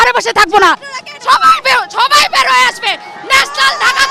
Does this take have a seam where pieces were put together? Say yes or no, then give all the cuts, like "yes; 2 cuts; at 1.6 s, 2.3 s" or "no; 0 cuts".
no; 0 cuts